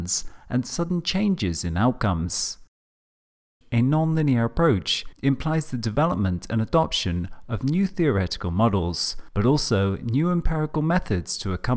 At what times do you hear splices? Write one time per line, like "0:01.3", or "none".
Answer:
0:04.2